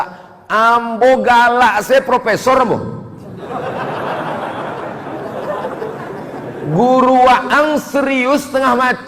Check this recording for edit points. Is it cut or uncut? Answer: uncut